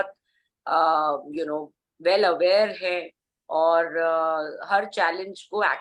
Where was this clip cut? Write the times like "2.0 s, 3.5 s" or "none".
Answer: none